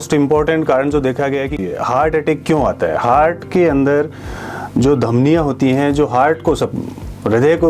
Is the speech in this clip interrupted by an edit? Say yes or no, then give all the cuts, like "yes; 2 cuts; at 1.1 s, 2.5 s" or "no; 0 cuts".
yes; 1 cut; at 1.6 s